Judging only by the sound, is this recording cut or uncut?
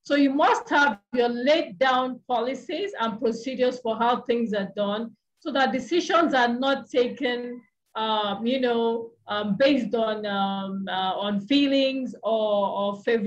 uncut